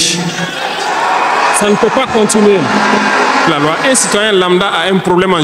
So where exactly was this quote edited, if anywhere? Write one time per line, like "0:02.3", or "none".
0:03.5